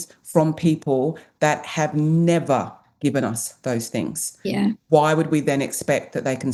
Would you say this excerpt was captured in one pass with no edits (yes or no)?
yes